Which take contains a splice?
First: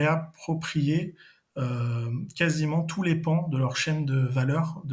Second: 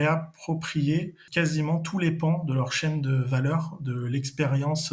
second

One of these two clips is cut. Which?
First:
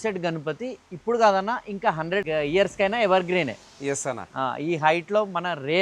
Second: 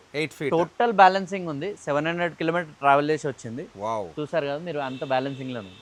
first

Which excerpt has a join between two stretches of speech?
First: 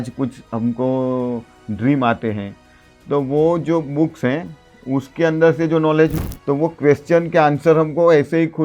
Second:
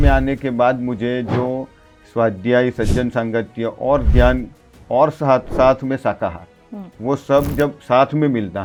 first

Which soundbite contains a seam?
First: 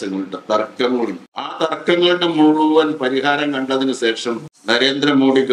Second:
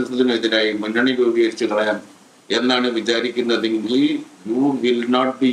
first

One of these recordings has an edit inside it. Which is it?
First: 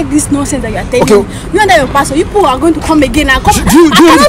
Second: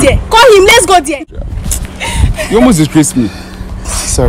second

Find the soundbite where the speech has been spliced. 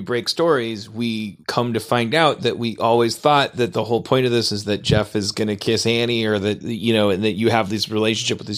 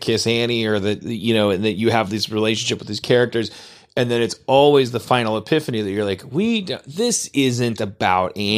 first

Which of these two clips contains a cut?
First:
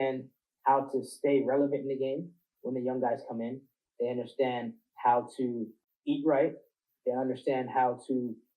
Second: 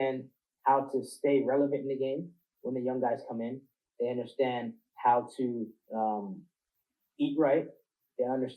first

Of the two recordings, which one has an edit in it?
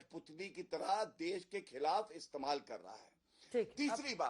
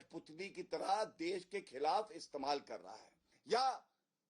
second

